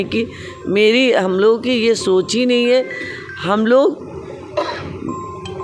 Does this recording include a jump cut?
no; 0 cuts

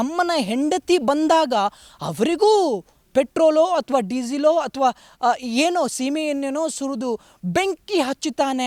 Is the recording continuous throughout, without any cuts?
yes; 0 cuts

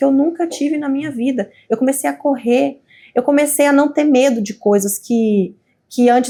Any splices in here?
no; 0 cuts

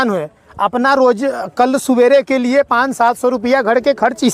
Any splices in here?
no; 0 cuts

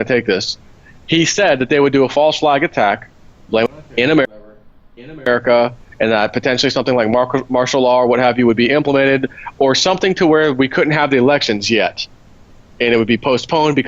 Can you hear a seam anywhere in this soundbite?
no; 0 cuts

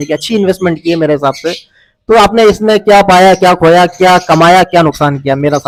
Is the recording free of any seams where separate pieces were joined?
yes; 0 cuts

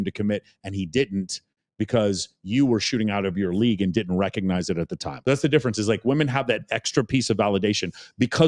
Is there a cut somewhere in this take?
yes; 1 cut; at 5.1 s

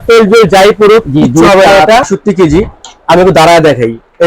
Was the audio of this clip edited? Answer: yes; 1 cut; at 2.1 s

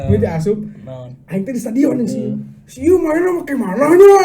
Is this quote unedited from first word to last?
yes; 0 cuts

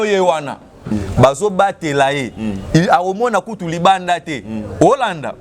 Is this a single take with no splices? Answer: no; 1 cut; at 0.9 s

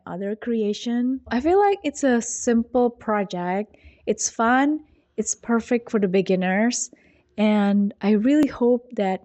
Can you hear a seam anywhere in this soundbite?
yes; 1 cut; at 1.3 s

